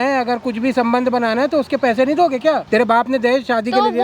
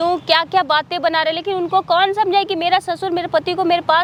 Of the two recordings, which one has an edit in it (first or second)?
first